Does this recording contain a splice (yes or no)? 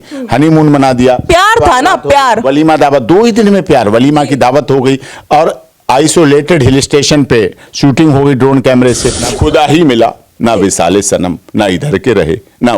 yes